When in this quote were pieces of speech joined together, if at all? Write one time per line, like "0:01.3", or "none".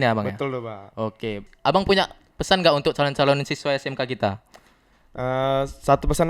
0:01.5